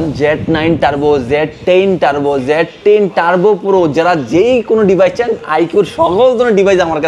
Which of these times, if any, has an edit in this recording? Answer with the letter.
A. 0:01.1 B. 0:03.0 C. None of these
C